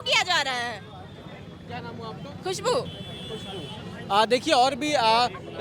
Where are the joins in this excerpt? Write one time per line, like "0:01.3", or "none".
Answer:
none